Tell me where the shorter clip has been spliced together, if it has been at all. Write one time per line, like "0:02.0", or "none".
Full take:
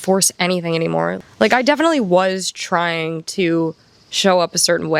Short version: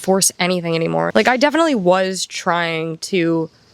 0:01.1